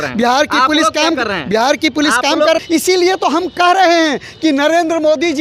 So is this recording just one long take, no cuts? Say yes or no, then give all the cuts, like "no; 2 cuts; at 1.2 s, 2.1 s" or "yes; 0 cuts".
no; 1 cut; at 2.6 s